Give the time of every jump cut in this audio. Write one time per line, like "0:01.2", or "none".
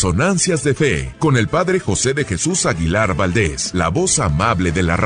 0:01.1
0:03.6